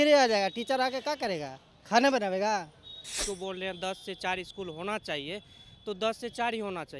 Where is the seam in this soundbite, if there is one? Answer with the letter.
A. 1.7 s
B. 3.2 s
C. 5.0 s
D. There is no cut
B